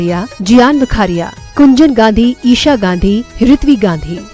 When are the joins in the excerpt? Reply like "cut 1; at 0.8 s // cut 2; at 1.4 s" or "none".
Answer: none